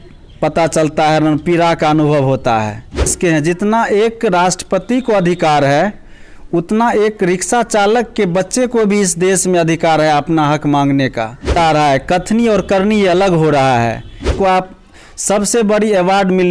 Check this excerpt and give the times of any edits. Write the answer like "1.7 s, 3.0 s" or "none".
3.1 s, 11.6 s, 14.3 s